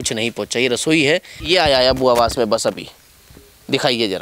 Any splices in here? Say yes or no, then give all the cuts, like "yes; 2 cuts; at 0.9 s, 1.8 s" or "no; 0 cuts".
yes; 1 cut; at 1.3 s